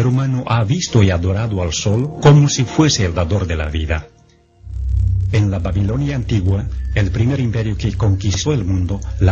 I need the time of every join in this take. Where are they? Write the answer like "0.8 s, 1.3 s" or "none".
6.2 s